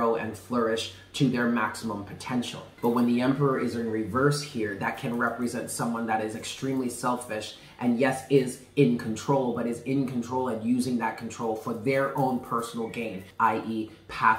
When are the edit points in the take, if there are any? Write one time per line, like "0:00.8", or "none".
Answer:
0:02.6
0:13.2

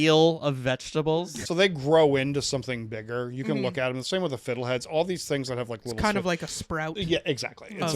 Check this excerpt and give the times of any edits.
0:01.1

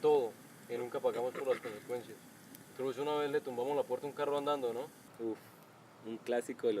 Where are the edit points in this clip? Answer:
0:05.0

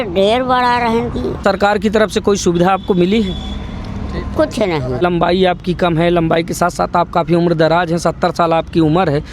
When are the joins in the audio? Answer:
0:01.4
0:05.0

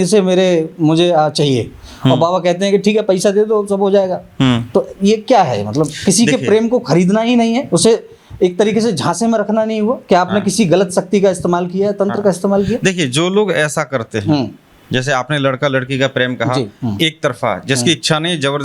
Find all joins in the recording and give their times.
none

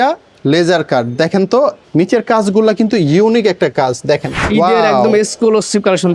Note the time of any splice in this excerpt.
0:01.8
0:04.3

